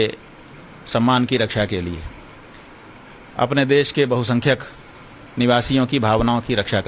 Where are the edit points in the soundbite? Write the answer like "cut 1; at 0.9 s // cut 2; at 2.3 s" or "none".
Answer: cut 1; at 4.3 s